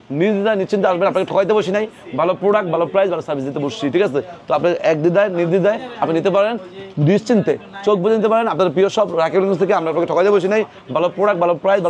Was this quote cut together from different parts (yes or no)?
no